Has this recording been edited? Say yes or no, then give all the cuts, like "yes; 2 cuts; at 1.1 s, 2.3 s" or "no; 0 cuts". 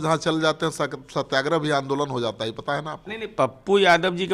no; 0 cuts